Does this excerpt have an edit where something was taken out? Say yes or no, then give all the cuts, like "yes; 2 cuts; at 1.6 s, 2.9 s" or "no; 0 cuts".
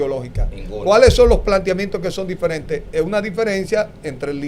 no; 0 cuts